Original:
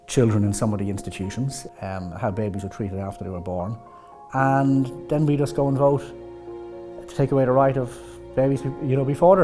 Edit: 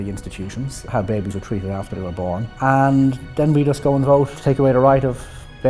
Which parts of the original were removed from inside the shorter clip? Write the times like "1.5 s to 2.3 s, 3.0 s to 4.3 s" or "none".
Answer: 1.6 s to 2.1 s, 3.8 s to 4.2 s, 6.1 s to 7.1 s